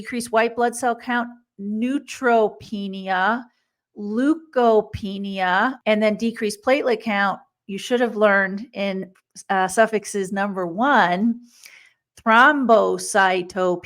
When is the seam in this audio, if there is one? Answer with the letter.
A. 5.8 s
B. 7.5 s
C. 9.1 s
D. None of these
A